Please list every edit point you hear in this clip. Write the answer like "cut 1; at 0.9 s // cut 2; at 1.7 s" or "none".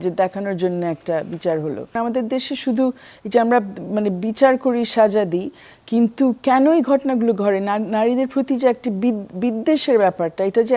cut 1; at 1.9 s